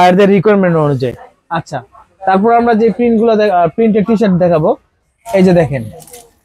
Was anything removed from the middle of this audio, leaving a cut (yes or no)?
no